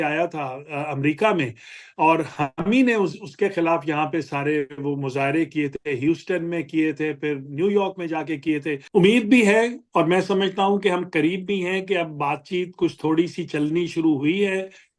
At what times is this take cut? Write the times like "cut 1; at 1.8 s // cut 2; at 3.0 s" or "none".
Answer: cut 1; at 8.8 s